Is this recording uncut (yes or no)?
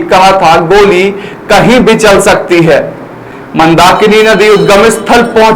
no